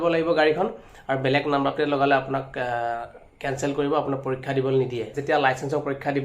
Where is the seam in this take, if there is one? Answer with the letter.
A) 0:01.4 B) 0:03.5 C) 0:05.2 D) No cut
C